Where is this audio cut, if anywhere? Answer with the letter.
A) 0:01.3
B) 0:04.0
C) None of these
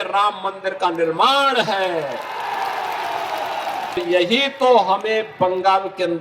B